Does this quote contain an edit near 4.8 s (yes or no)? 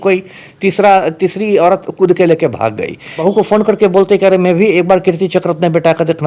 no